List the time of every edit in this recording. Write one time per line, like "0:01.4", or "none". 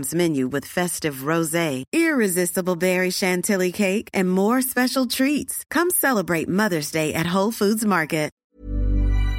0:08.4